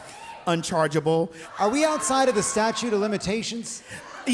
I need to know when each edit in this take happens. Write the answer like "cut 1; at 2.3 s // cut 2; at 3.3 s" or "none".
cut 1; at 1.4 s